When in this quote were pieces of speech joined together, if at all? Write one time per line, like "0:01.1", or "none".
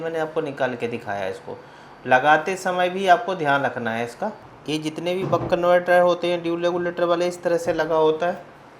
0:04.4